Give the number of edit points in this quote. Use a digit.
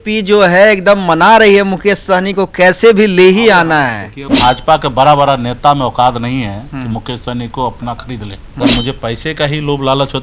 2